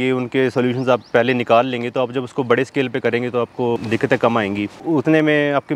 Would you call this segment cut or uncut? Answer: cut